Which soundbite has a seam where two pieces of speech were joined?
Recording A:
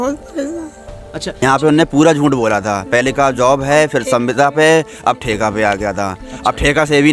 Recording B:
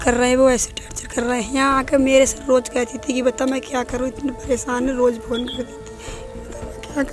A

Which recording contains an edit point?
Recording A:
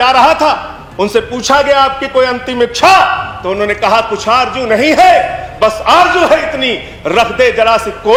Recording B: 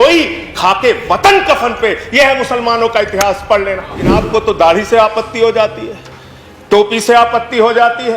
B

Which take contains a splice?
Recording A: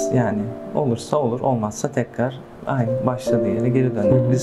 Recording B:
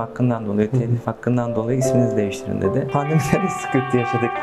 B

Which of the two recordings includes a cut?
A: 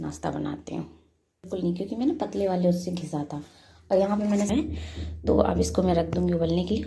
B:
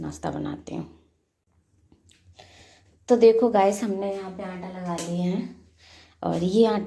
A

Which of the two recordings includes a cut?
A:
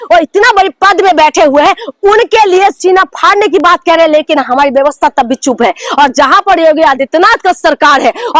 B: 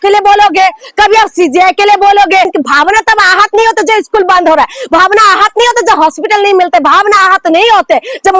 B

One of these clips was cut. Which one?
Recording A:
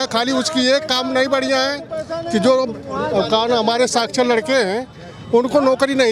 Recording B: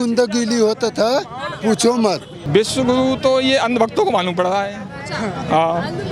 B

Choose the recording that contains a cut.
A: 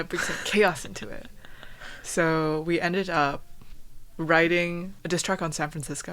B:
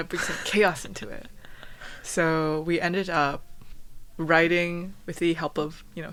A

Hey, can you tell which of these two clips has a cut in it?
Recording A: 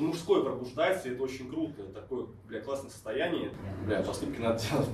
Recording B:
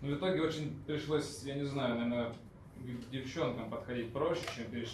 A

